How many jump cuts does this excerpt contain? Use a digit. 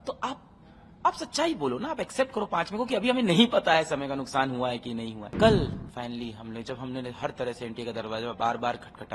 1